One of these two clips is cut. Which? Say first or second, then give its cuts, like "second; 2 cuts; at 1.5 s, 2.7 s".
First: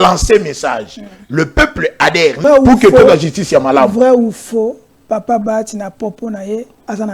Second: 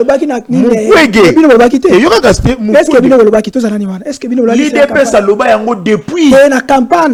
first; 1 cut; at 2.4 s